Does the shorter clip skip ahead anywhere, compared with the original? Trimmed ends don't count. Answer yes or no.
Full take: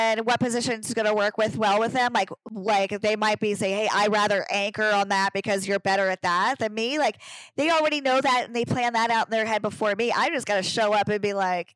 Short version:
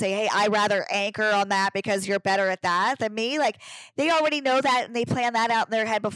no